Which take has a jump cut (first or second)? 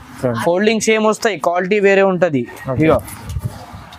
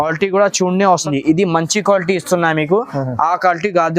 second